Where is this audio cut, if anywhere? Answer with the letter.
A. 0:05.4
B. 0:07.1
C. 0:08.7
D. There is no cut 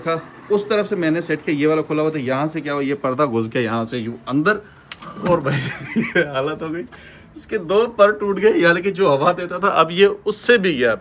D